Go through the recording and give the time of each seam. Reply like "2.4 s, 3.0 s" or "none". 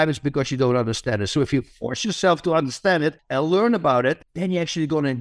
3.2 s, 4.3 s